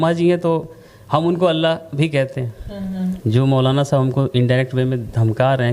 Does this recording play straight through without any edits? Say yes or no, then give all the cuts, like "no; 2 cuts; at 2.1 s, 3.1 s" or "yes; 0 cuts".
no; 1 cut; at 3.2 s